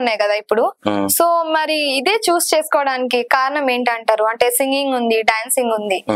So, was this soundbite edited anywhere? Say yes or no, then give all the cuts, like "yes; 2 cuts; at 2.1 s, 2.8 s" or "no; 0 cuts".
no; 0 cuts